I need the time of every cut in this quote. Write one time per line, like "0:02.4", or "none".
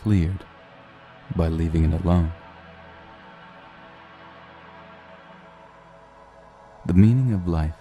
0:03.3